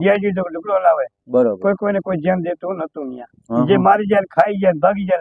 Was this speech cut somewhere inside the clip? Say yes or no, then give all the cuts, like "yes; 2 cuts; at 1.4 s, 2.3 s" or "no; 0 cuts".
no; 0 cuts